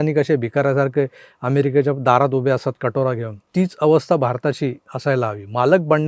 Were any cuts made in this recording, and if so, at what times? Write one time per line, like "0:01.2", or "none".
0:03.4
0:04.9